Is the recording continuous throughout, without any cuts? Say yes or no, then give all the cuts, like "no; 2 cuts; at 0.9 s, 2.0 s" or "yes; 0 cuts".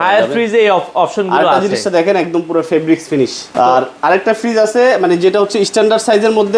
no; 1 cut; at 3.5 s